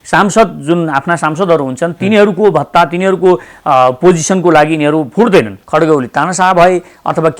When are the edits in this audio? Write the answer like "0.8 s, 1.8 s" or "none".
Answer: 5.6 s